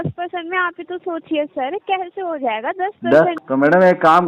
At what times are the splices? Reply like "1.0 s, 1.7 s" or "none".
3.4 s